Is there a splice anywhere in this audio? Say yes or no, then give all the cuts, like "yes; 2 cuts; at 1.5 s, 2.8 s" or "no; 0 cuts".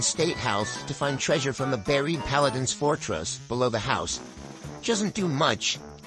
yes; 1 cut; at 1.2 s